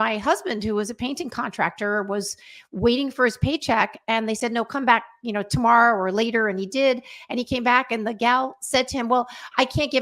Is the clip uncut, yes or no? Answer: yes